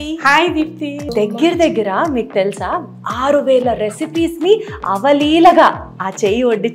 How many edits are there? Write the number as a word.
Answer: one